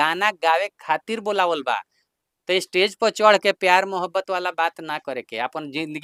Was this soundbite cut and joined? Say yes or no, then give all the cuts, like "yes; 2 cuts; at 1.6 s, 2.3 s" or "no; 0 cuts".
no; 0 cuts